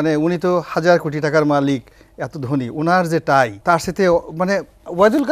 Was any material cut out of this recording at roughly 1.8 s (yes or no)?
no